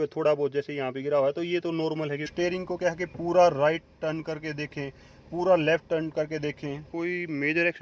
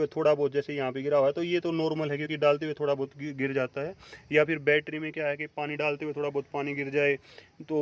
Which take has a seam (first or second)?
first